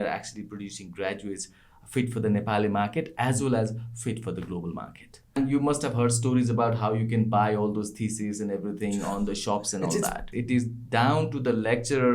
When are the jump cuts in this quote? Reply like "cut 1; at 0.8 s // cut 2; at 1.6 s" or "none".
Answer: cut 1; at 5.4 s // cut 2; at 10.3 s